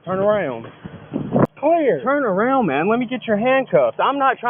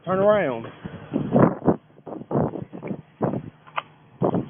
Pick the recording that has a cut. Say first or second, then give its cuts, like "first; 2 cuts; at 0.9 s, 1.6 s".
first; 1 cut; at 1.5 s